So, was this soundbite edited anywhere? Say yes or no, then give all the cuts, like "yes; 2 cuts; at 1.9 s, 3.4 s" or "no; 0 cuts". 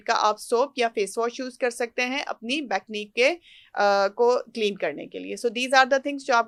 no; 0 cuts